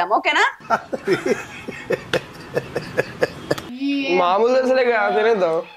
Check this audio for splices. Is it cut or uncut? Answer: cut